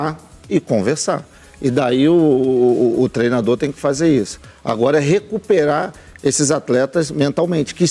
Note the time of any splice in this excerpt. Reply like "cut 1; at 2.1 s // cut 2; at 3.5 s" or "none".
none